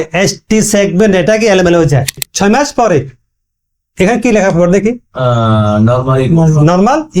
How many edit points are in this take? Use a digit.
1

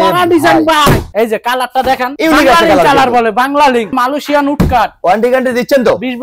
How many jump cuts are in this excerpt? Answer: 2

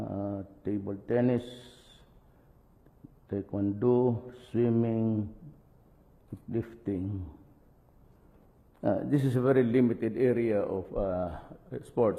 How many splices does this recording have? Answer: 0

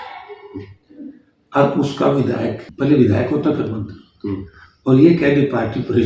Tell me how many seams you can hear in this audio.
1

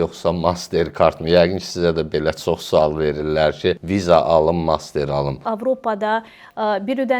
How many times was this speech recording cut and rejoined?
2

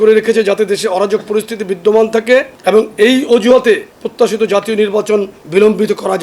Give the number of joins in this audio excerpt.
3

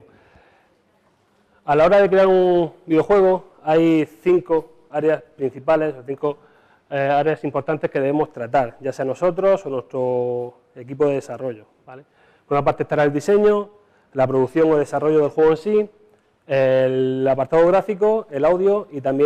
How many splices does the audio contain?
0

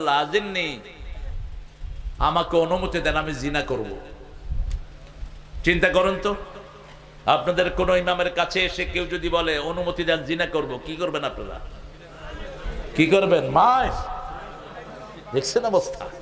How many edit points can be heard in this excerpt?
0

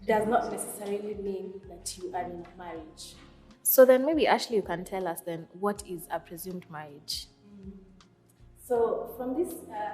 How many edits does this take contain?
0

